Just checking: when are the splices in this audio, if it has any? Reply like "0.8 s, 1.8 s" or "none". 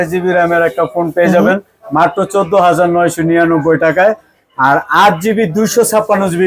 none